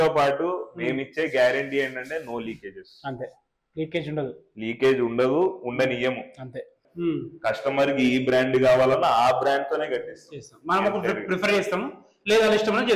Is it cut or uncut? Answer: cut